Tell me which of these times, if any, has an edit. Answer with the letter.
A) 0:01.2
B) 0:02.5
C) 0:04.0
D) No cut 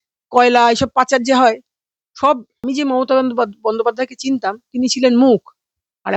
B